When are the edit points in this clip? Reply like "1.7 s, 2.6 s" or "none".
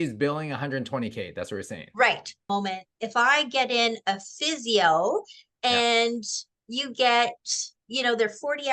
2.5 s